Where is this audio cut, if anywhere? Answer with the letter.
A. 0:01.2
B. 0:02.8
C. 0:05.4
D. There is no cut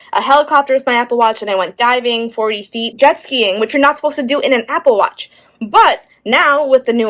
B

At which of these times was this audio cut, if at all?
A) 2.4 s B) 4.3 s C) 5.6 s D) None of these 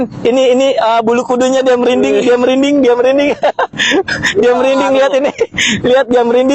B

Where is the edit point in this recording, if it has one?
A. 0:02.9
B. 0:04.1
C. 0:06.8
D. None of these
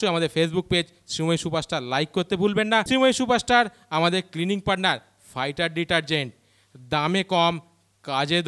A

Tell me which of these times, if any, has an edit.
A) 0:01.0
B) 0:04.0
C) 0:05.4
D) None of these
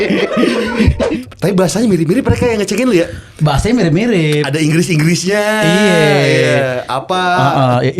A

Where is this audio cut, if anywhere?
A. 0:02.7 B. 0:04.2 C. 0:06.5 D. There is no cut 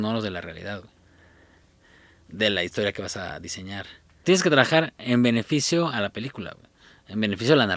B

